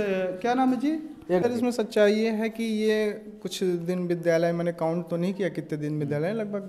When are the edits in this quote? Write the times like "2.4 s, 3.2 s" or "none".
1.4 s